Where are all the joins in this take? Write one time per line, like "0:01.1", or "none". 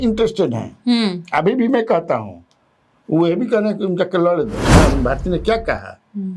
0:04.7